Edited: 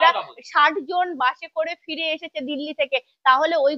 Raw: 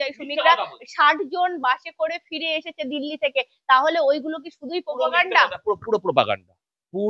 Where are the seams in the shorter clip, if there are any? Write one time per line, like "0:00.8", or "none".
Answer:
none